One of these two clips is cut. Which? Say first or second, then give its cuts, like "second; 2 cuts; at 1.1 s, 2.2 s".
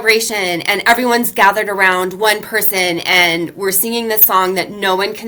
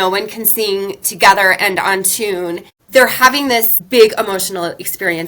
second; 2 cuts; at 2.7 s, 3.8 s